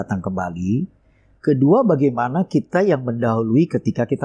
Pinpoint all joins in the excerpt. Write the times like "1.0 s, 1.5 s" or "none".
none